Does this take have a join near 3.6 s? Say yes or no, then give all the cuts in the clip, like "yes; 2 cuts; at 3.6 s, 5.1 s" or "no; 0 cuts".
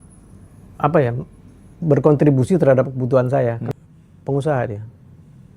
yes; 1 cut; at 3.6 s